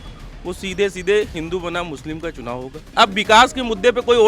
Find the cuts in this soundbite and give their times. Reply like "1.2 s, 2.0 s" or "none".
2.9 s